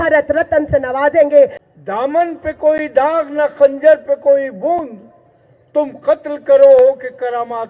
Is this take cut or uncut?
cut